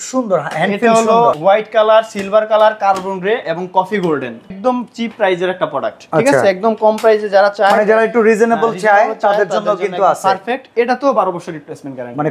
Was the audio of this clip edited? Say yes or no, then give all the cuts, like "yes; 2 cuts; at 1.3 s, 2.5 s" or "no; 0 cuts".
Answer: yes; 2 cuts; at 1.3 s, 4.5 s